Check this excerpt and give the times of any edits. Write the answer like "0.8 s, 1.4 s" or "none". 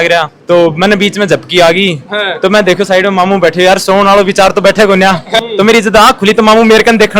5.3 s